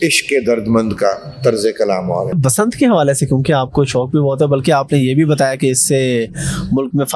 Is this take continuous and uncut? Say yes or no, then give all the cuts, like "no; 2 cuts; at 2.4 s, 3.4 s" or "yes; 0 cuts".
no; 1 cut; at 2.3 s